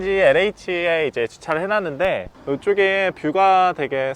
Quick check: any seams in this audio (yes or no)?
yes